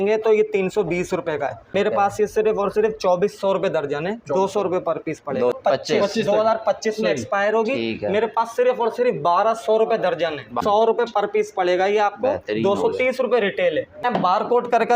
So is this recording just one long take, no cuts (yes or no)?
no